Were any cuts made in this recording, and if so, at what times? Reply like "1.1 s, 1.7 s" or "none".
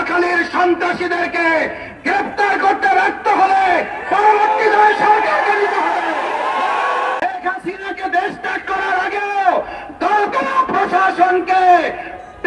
7.2 s